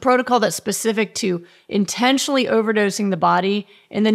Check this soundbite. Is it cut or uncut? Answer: uncut